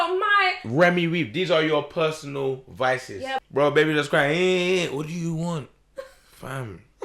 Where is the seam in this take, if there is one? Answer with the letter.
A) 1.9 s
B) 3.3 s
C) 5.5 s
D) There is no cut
B